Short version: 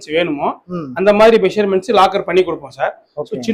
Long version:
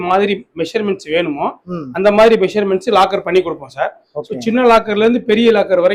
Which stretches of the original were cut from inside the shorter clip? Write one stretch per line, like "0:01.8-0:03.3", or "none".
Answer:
none